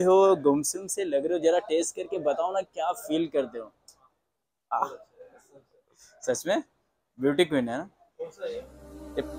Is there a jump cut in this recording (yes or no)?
no